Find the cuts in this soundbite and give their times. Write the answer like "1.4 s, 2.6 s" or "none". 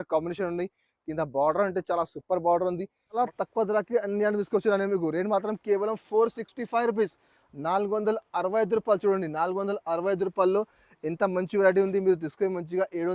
3.2 s

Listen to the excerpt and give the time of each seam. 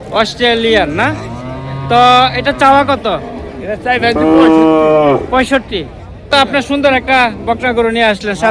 6.3 s

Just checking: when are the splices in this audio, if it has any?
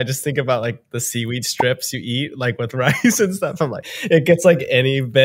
3.9 s

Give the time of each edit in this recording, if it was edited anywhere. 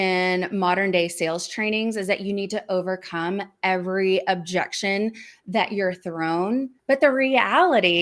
6.7 s

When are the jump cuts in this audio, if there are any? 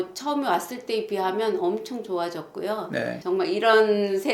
3.2 s

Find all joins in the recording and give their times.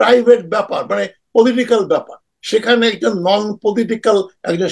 none

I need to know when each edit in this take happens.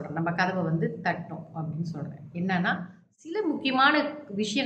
3.0 s

